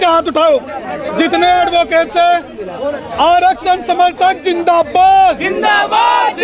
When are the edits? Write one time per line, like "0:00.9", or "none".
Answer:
none